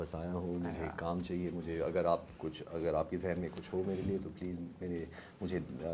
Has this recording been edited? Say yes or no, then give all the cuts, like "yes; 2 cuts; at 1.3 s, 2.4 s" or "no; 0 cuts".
no; 0 cuts